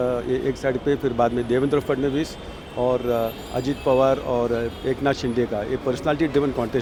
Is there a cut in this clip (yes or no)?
no